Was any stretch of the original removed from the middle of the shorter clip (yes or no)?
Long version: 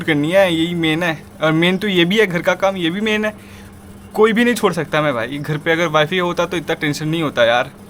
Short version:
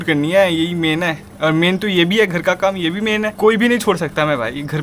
yes